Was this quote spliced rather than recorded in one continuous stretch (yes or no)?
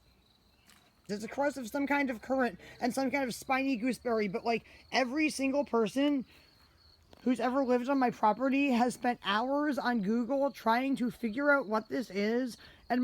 yes